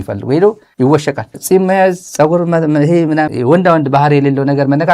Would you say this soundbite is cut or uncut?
cut